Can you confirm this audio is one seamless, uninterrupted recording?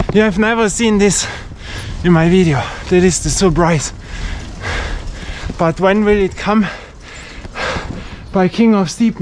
yes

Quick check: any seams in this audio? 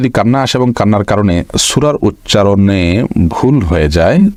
no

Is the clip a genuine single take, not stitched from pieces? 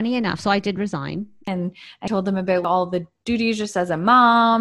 no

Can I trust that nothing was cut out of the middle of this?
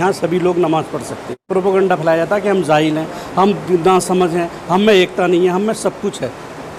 no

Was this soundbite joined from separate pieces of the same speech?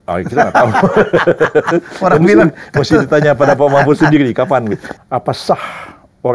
yes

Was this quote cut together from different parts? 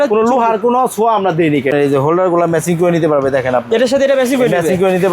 yes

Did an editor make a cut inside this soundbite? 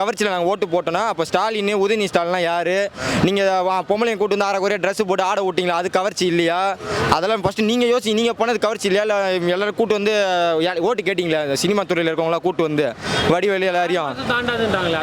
no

